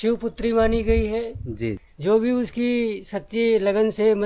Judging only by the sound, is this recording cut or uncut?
cut